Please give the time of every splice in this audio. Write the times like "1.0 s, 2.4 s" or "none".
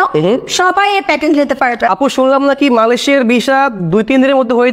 1.9 s